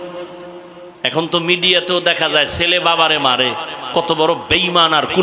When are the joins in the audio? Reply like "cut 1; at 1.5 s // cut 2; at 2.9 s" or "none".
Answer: none